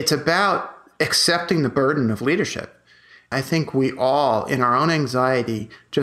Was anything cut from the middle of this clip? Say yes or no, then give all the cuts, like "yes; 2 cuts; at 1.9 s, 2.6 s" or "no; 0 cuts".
yes; 1 cut; at 3.3 s